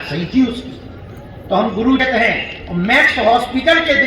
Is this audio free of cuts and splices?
no; 1 cut; at 2.0 s

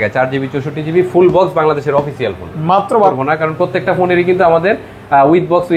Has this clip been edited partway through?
yes; 1 cut; at 3.1 s

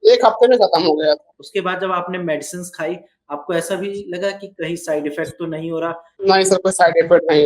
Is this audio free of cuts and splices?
no; 2 cuts; at 1.4 s, 6.1 s

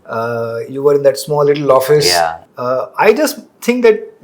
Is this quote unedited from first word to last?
no; 1 cut; at 2.5 s

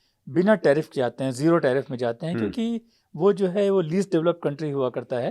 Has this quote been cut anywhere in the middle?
no; 0 cuts

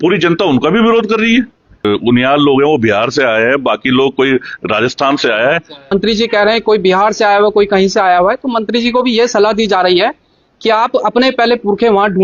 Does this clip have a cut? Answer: yes; 2 cuts; at 1.9 s, 5.9 s

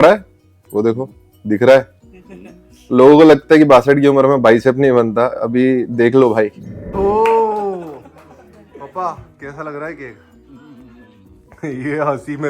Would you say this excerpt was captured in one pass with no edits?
no; 1 cut; at 6.9 s

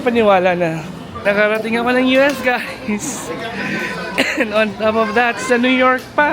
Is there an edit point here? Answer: yes; 1 cut; at 1.1 s

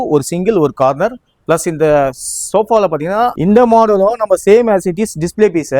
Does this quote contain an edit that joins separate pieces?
yes; 1 cut; at 3.4 s

